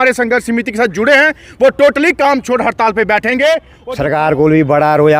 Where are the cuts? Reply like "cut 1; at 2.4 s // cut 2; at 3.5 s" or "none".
cut 1; at 3.7 s